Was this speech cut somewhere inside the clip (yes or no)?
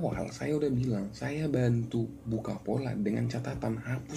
no